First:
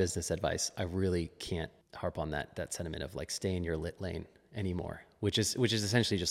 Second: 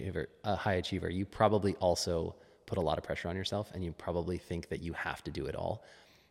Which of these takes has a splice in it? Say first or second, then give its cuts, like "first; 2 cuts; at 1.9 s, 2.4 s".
first; 1 cut; at 1.8 s